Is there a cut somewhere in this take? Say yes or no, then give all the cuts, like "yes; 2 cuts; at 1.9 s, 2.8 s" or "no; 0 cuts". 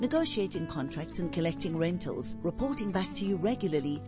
no; 0 cuts